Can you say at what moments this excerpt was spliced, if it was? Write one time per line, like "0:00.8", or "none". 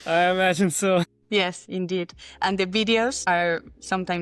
0:01.3
0:03.2